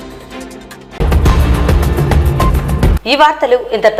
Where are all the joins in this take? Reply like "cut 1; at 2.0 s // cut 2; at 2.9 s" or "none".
none